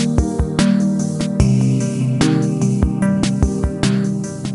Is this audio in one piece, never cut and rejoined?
yes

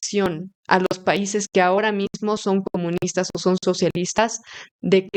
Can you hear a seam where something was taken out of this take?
no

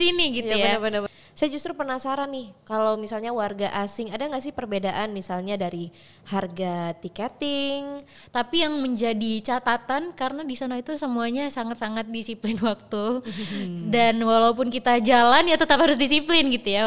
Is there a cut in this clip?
yes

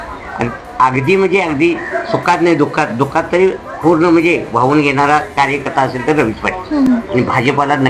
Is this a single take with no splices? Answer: yes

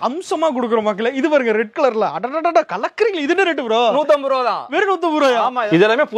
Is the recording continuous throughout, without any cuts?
yes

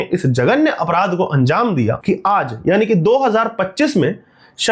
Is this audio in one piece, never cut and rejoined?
no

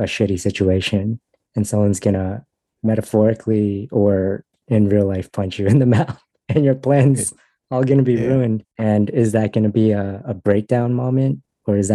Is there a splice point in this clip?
no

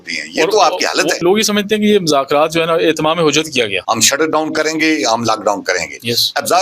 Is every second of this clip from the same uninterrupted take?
no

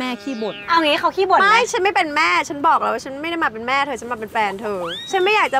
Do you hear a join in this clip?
no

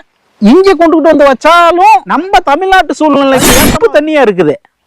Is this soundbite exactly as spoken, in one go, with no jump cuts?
no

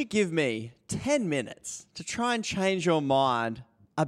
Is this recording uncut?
yes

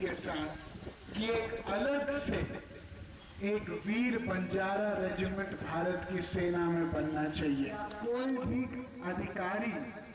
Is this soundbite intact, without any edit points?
no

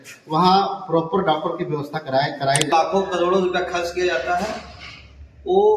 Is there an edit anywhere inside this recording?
yes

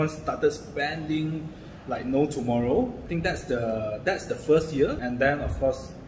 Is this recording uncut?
no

